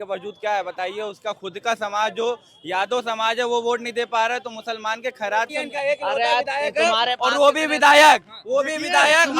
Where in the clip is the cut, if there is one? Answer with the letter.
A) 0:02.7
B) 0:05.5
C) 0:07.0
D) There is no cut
B